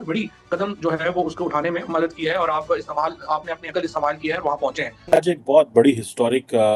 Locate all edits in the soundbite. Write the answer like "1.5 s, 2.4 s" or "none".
4.9 s